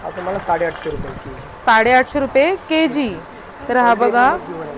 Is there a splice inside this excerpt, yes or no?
no